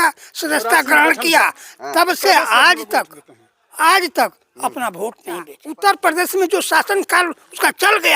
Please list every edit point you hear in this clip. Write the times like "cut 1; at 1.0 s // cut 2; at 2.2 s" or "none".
cut 1; at 5.6 s